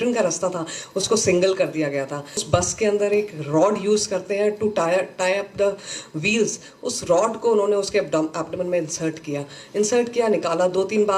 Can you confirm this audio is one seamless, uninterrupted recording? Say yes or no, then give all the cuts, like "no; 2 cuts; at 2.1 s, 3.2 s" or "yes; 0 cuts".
no; 1 cut; at 2.6 s